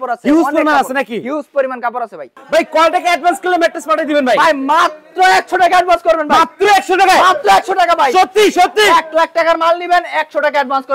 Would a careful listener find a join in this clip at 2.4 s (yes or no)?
yes